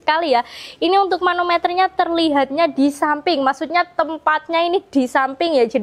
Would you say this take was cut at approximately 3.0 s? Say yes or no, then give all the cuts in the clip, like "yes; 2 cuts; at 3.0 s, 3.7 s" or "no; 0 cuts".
no; 0 cuts